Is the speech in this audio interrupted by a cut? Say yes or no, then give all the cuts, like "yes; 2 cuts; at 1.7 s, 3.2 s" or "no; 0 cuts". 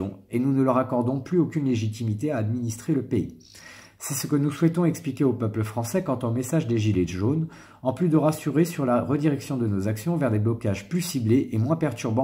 no; 0 cuts